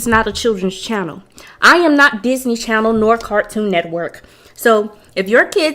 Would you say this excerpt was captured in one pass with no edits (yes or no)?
yes